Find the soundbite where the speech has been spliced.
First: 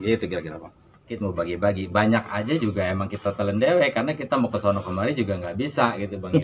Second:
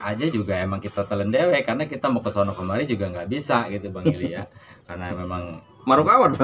first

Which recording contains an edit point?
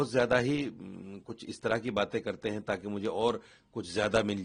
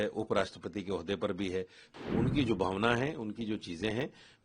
second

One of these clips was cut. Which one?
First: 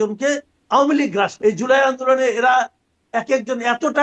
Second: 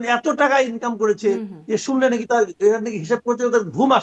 first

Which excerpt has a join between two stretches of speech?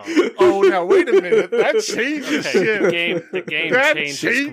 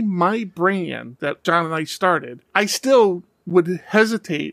second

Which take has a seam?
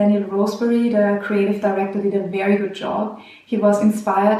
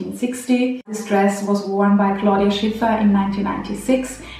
second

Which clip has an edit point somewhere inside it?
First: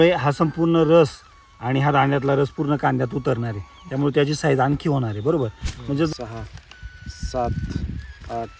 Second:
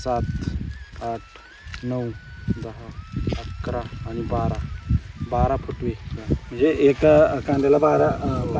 first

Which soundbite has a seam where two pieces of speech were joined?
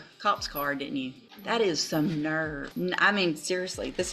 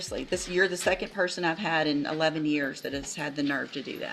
first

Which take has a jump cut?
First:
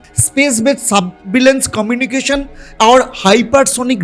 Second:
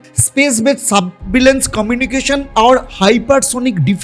second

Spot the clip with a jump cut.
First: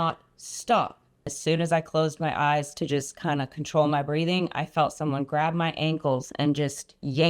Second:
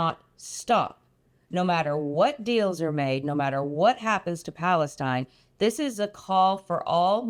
first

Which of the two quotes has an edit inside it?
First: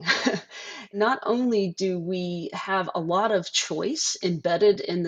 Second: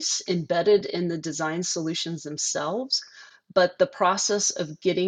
first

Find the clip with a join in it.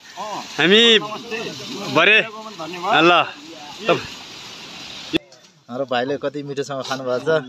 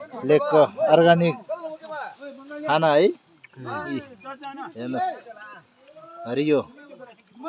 first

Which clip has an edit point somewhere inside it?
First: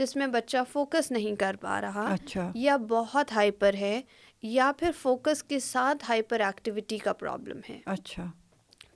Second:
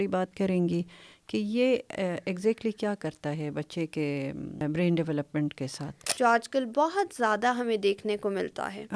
second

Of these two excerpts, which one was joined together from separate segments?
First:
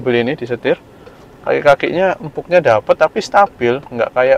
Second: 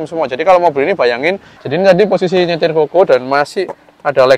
second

